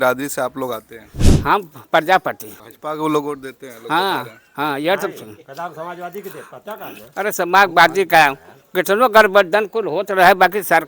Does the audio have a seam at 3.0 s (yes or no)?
no